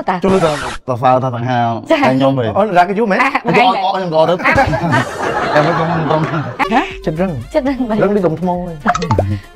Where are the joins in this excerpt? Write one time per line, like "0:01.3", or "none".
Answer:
0:06.6